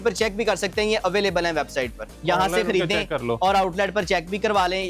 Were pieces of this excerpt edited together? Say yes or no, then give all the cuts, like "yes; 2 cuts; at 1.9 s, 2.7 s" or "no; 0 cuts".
yes; 1 cut; at 2.2 s